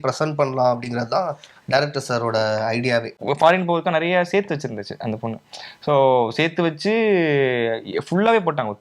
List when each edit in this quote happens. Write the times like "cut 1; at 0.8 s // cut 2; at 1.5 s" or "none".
cut 1; at 3.1 s